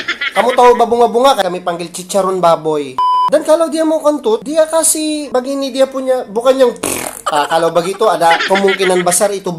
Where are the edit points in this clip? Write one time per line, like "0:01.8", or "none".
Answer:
0:01.4
0:03.1